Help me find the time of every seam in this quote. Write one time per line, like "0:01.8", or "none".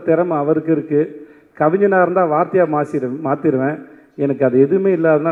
none